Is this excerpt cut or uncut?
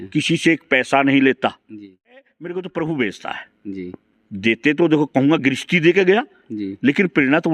cut